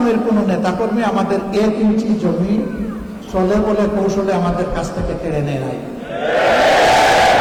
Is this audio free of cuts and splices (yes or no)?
yes